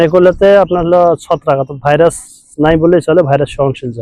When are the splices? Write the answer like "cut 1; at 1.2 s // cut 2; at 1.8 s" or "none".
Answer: none